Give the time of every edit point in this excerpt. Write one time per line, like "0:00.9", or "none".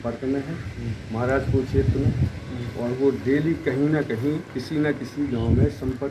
none